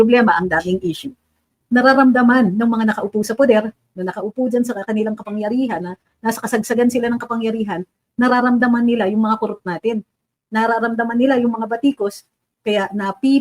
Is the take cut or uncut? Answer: cut